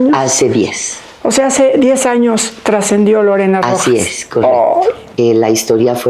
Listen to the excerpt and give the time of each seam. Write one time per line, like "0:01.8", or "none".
0:05.1